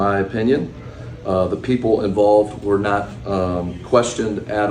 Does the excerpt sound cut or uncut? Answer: cut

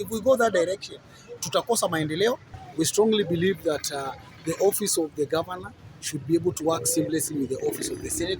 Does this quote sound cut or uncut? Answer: cut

